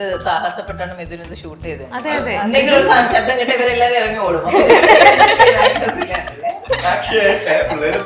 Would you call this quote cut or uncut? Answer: uncut